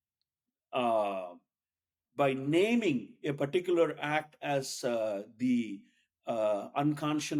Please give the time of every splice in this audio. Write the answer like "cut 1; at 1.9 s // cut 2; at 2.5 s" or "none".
none